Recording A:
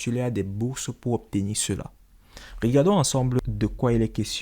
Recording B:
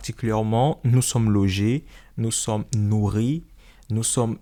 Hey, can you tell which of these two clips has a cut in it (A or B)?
A